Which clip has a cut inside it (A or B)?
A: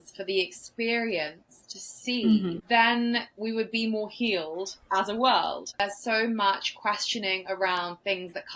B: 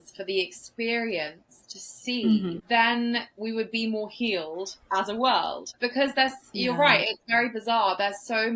A